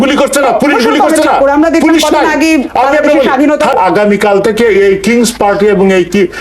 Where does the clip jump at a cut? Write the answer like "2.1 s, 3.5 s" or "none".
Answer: 3.7 s